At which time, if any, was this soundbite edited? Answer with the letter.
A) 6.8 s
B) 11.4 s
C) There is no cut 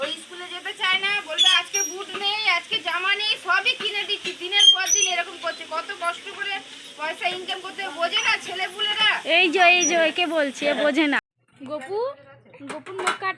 B